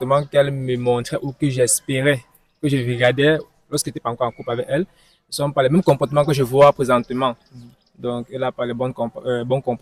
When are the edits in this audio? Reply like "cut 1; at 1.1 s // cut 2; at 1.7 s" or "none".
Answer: none